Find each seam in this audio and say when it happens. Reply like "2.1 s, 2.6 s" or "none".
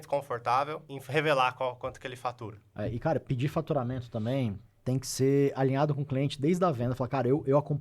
0.9 s, 2.7 s, 4.7 s